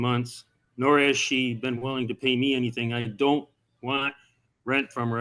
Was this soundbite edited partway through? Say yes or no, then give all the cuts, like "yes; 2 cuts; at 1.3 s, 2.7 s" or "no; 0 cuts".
no; 0 cuts